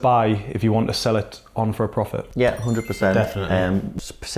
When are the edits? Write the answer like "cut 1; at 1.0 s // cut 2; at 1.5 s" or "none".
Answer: none